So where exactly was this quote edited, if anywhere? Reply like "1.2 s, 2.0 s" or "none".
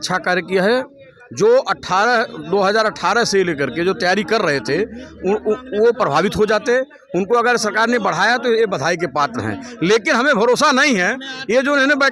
none